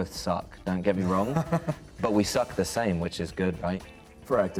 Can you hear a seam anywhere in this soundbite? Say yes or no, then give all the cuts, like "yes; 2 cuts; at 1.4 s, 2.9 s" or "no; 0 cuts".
no; 0 cuts